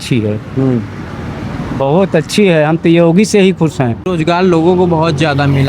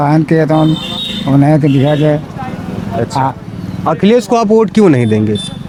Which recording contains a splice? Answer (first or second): first